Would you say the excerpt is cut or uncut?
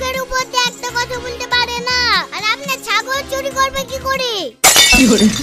uncut